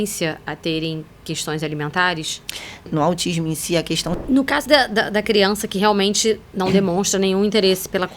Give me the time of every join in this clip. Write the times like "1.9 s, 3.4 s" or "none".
2.8 s, 4.2 s